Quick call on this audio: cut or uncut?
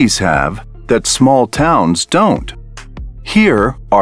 uncut